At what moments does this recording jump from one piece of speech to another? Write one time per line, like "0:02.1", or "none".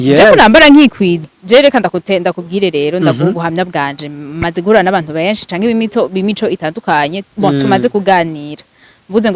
0:01.2